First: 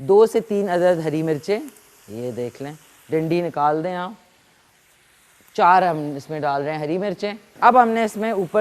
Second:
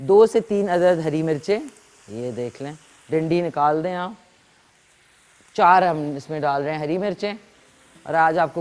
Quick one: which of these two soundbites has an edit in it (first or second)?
first